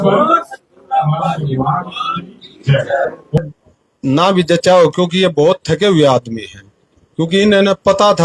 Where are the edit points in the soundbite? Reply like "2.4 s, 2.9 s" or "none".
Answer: 3.4 s